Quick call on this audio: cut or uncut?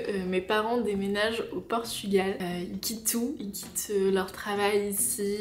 uncut